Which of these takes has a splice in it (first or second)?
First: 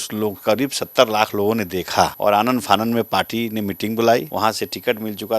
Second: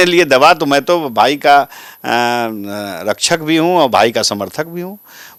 first